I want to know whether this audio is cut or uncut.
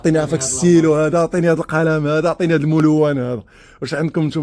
uncut